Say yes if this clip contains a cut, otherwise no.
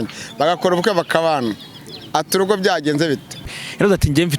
yes